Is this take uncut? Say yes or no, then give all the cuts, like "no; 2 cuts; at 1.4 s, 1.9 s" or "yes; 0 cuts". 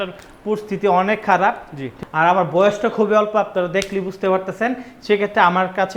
no; 1 cut; at 2.0 s